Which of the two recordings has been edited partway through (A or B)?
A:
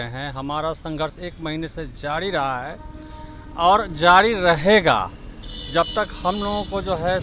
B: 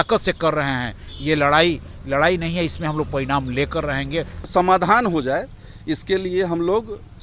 B